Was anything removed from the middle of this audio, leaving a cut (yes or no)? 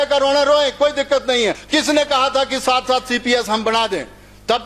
yes